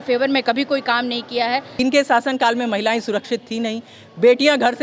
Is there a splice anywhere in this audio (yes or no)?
yes